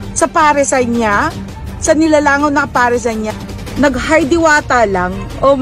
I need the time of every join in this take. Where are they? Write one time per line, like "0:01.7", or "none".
0:03.3